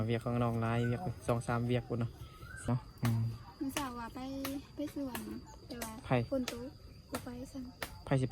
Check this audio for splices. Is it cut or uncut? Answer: cut